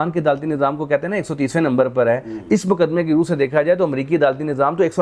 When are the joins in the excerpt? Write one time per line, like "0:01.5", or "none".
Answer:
none